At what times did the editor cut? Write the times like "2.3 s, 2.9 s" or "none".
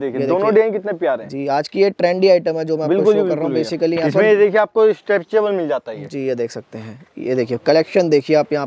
none